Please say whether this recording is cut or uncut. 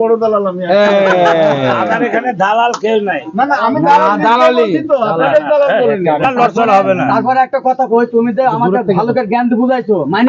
cut